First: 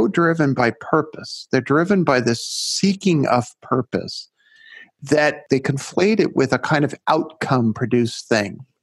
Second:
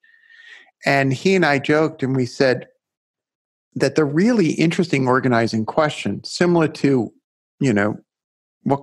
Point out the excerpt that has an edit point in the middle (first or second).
first